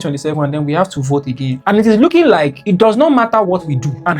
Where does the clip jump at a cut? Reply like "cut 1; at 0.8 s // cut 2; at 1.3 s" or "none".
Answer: cut 1; at 1.6 s